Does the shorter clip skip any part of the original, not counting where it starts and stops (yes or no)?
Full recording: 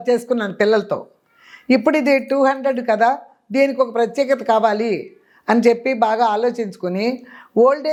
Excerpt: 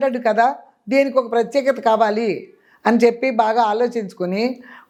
no